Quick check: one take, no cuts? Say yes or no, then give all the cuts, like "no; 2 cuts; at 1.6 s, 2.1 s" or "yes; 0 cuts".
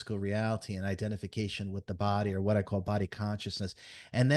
yes; 0 cuts